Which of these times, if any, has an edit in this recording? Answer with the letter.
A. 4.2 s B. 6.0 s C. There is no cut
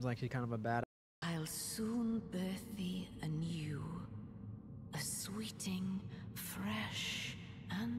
C